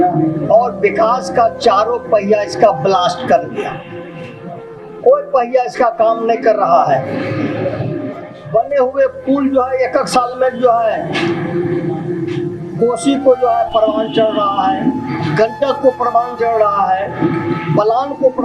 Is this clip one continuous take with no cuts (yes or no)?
yes